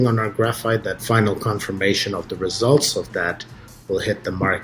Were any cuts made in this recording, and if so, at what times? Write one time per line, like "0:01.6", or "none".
0:01.0